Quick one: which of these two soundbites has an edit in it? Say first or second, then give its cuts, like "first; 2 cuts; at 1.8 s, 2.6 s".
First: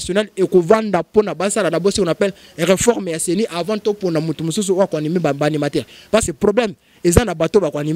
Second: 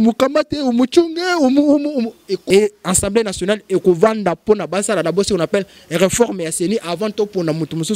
second; 1 cut; at 2.3 s